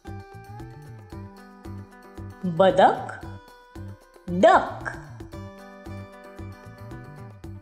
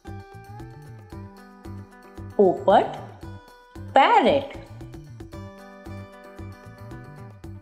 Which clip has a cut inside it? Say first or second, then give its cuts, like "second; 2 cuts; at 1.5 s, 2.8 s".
second; 2 cuts; at 2.3 s, 4.9 s